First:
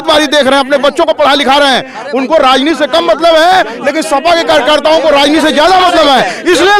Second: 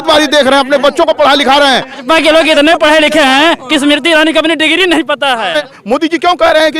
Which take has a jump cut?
second; 2 cuts; at 1.9 s, 5.7 s

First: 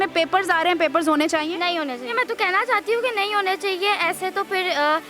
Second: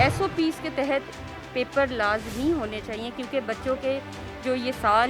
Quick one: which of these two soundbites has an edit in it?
first; 1 cut; at 2.1 s

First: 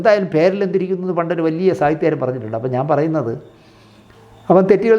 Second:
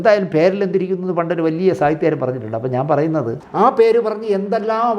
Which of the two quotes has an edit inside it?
second; 1 cut; at 3.4 s

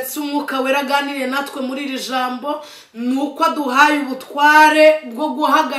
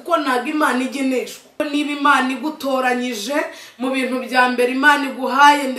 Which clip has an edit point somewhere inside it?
second; 1 cut; at 1.6 s

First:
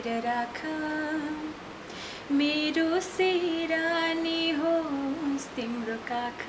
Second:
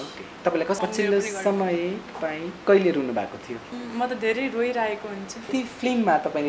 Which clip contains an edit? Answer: second; 3 cuts; at 0.8 s, 3.8 s, 5.5 s

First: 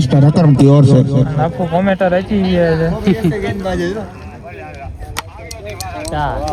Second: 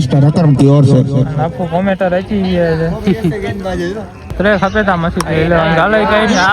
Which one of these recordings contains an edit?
second; 1 cut; at 4.3 s

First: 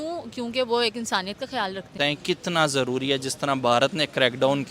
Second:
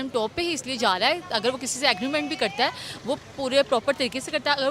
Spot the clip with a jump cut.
first; 1 cut; at 1.9 s

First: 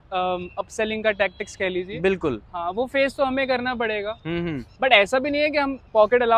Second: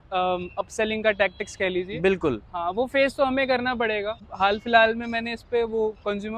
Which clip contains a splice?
second; 1 cut; at 4.2 s

